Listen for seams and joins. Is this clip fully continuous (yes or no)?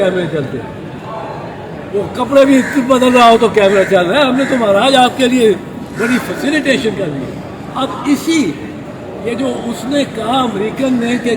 yes